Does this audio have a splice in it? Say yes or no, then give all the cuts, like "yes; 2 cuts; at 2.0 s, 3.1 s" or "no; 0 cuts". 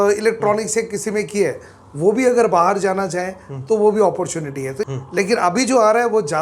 yes; 1 cut; at 4.8 s